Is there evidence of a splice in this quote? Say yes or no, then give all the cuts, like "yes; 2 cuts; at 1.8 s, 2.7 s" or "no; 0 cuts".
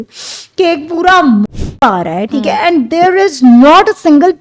no; 0 cuts